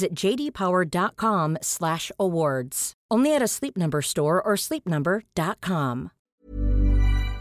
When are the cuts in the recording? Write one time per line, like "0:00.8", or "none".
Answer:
0:06.1